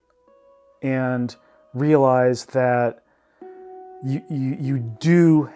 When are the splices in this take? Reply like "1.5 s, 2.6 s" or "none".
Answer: none

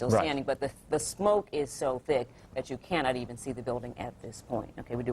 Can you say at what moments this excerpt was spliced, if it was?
3.5 s

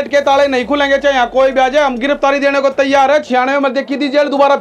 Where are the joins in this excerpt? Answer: none

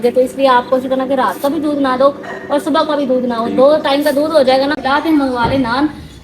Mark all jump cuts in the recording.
4.8 s

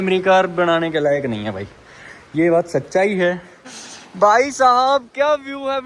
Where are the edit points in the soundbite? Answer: 3.5 s

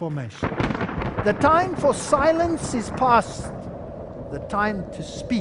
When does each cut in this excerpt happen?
3.6 s

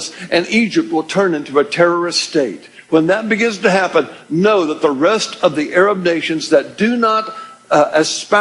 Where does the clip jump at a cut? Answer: 3.9 s

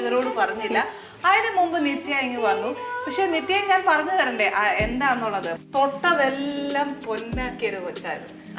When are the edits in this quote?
5.5 s

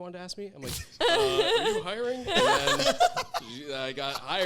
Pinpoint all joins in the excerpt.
none

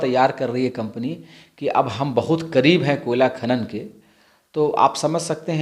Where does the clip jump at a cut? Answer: none

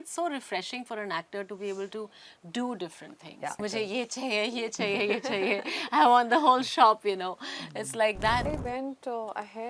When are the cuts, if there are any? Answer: 3.6 s, 8.5 s

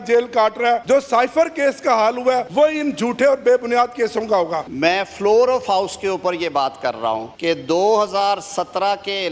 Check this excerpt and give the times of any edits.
0.8 s, 2.5 s, 4.7 s, 7.3 s

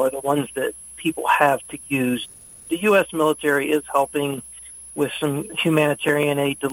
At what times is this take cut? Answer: 2.3 s, 5.5 s

